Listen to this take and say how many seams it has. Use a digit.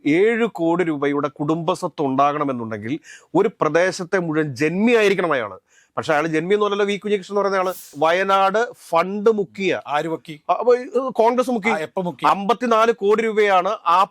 1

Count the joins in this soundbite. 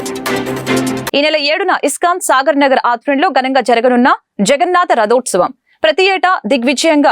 1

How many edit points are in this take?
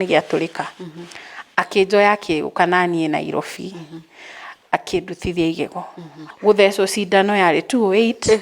1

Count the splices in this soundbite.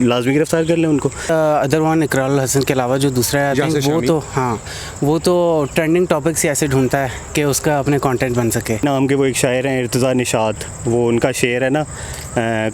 2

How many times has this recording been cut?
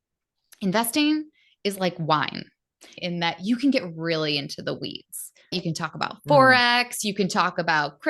2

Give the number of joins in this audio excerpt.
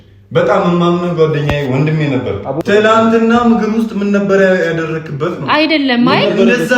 1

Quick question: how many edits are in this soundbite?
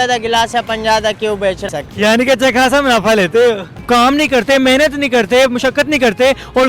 2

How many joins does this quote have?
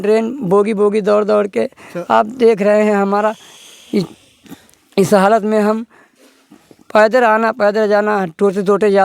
0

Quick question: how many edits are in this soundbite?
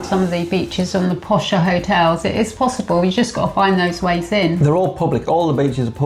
0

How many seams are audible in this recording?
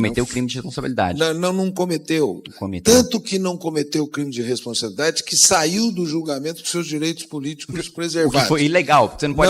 0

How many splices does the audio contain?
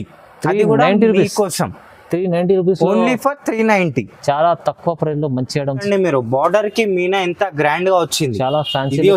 1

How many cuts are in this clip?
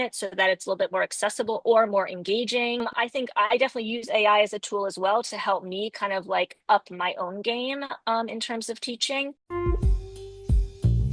2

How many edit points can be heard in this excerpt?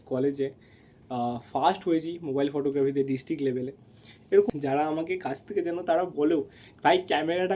1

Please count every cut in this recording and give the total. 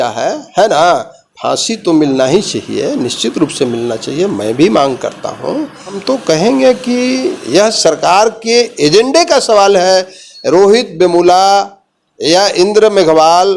1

